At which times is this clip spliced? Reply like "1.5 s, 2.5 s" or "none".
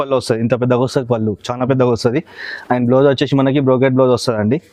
none